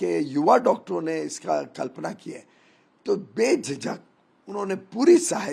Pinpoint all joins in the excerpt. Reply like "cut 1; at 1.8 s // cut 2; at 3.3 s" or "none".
none

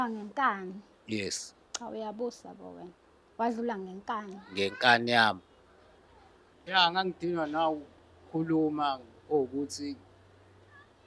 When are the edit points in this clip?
cut 1; at 6.5 s

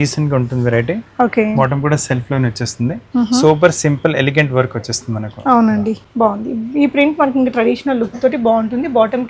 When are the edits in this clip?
cut 1; at 6.0 s

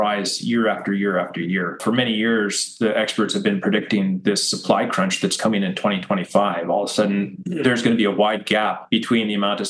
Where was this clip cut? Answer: none

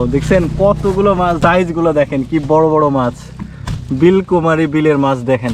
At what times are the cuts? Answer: cut 1; at 1.4 s

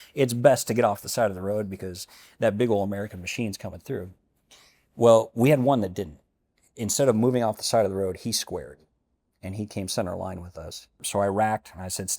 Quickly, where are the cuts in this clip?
cut 1; at 11.0 s

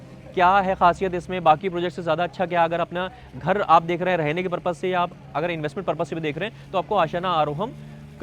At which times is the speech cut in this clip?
none

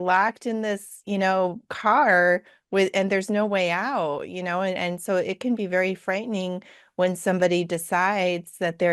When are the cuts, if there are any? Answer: none

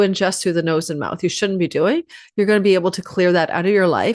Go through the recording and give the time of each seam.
none

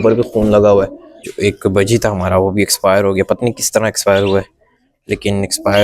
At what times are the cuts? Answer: cut 1; at 1.2 s

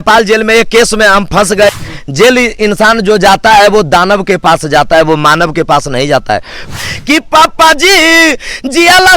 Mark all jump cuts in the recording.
cut 1; at 1.7 s // cut 2; at 6.7 s

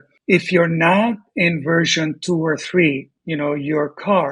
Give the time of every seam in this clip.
none

